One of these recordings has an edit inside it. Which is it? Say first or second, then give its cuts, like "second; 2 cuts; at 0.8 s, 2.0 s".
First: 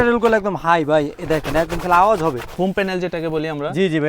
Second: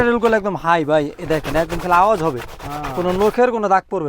first; 1 cut; at 2.5 s